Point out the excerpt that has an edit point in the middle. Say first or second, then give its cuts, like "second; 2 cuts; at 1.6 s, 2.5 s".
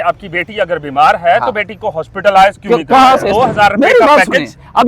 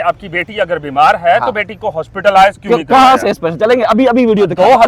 first; 1 cut; at 3.2 s